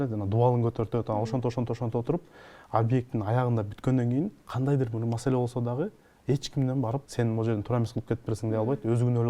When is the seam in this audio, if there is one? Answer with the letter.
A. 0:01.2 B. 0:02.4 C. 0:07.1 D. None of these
C